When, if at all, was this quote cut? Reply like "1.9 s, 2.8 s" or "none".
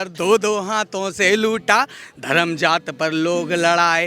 none